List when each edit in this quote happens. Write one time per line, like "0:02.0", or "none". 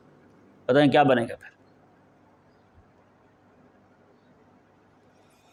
none